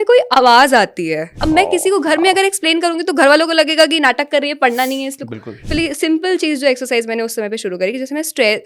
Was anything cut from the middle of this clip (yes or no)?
yes